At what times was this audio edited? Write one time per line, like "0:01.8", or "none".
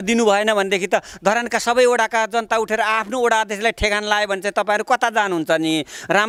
none